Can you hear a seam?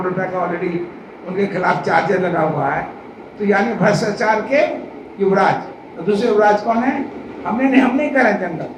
no; 0 cuts

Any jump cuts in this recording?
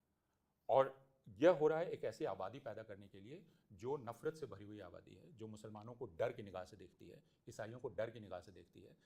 no; 0 cuts

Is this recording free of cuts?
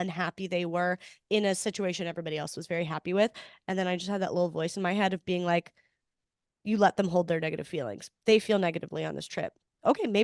yes; 0 cuts

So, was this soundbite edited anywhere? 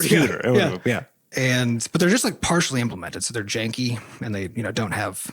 yes; 1 cut; at 1.1 s

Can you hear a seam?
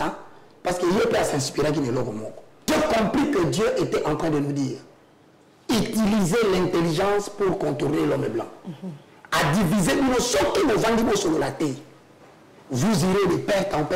yes; 1 cut; at 2.5 s

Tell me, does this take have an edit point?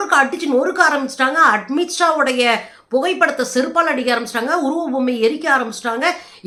no; 0 cuts

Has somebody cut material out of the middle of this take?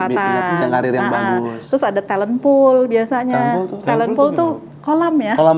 no; 0 cuts

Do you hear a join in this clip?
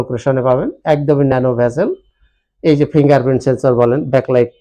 no; 0 cuts

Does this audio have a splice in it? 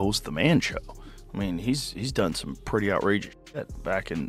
no; 0 cuts

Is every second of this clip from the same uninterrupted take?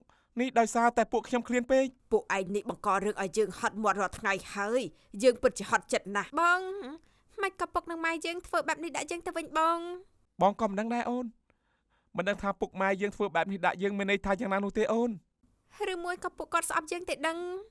no; 2 cuts; at 2.0 s, 6.2 s

